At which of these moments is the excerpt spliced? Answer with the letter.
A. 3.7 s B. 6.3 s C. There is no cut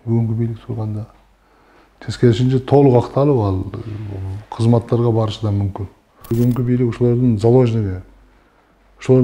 B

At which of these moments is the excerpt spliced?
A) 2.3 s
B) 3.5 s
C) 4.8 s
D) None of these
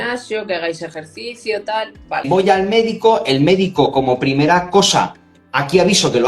A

